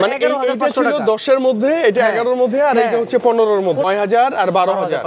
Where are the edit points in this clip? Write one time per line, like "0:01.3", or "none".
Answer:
0:03.8